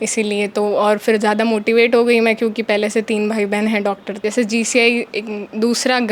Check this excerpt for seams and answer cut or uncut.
cut